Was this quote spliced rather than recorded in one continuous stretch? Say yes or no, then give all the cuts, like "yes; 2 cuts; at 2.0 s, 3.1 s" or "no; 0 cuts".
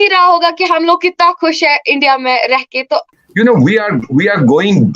yes; 1 cut; at 3.1 s